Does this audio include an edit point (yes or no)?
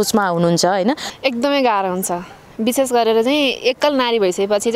yes